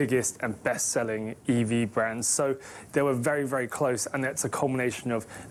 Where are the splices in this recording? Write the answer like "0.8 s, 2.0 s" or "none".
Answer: none

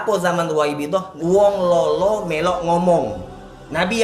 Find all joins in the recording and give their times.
1.1 s

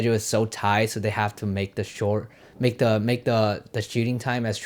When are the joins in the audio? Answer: none

